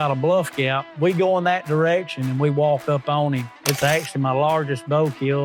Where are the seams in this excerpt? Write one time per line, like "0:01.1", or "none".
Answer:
0:00.9
0:03.5